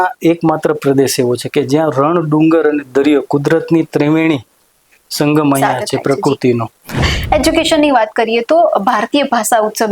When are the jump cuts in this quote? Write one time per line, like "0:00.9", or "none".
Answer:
0:07.1

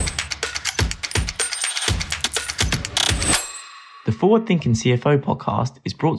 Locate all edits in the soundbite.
0:03.8

